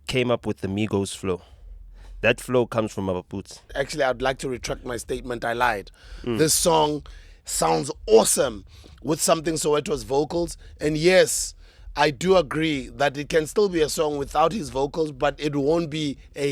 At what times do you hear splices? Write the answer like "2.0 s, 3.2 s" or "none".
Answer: 3.7 s